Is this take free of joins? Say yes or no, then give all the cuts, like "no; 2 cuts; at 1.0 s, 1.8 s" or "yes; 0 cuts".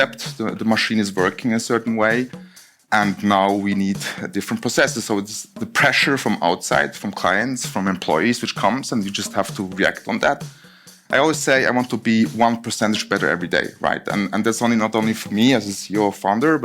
no; 1 cut; at 10.4 s